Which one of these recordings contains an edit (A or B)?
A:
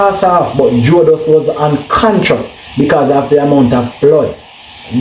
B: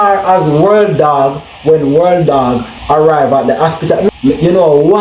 B